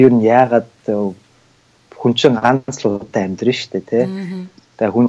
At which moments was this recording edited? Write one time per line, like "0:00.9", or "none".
none